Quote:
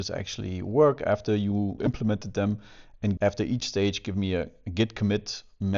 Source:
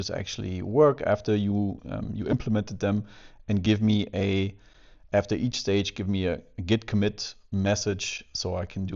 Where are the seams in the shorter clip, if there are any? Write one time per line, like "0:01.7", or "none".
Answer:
0:01.8
0:03.2